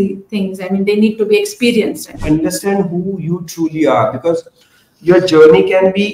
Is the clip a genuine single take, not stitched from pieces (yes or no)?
no